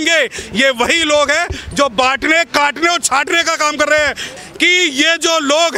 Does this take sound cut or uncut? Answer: cut